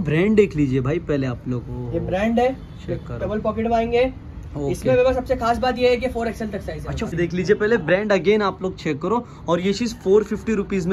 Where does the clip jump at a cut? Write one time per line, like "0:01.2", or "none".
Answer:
0:07.2